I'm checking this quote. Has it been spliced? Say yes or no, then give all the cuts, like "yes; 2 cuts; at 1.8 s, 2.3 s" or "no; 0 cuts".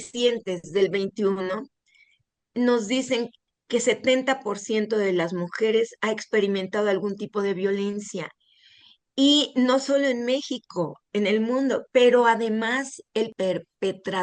yes; 1 cut; at 3.4 s